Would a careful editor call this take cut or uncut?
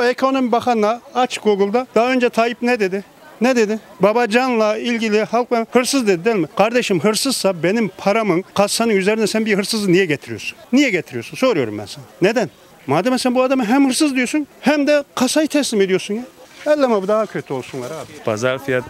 uncut